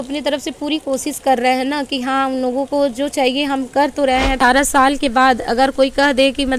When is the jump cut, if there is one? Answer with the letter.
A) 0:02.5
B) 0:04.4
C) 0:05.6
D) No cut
B